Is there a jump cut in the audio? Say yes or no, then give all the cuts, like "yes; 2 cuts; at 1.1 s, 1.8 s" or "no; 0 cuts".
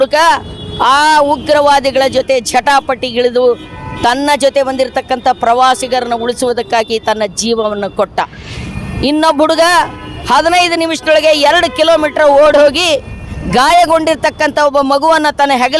no; 0 cuts